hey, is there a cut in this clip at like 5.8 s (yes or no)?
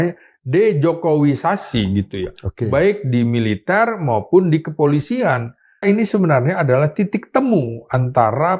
yes